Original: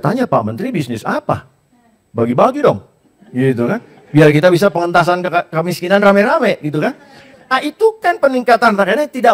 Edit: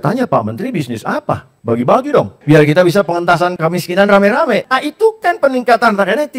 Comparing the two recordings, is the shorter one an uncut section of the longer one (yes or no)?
no